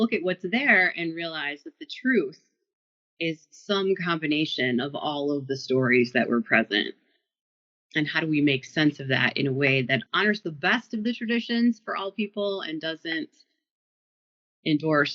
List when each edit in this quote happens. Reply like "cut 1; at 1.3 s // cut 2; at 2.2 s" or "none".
cut 1; at 10.1 s